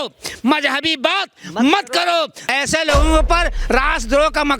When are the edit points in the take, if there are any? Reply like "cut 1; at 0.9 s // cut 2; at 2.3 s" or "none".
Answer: cut 1; at 2.4 s